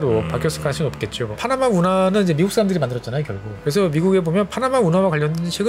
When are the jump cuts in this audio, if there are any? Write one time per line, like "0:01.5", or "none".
0:01.3
0:03.5